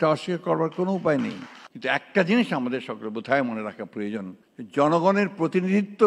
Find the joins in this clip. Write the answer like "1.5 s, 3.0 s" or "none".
1.6 s

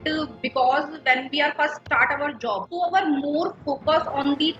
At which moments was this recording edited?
1.8 s, 2.7 s

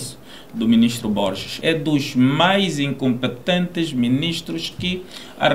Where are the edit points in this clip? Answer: 1.6 s

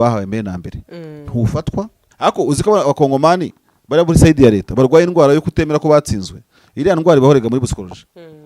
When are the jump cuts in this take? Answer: 2.0 s

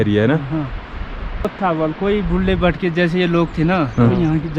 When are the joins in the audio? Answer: 1.4 s

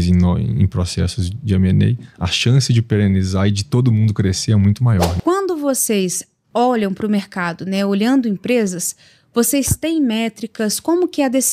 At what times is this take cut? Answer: 5.1 s

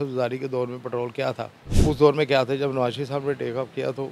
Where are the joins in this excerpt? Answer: 1.6 s

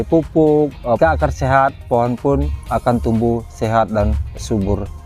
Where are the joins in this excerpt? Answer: 1.0 s

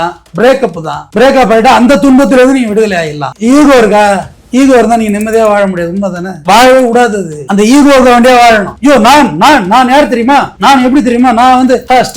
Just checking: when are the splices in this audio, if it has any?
3.2 s

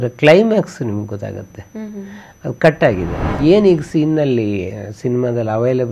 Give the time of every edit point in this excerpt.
3.4 s

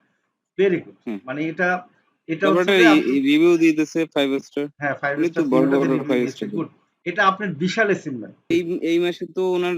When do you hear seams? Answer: 8.5 s

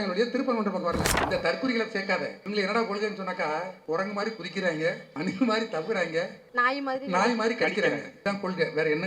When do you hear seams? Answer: 1.1 s, 2.4 s, 3.8 s, 5.1 s, 6.4 s, 8.1 s

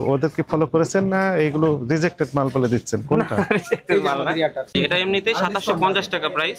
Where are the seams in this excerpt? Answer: 4.7 s

